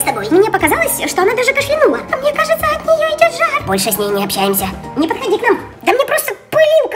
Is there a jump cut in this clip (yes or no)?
yes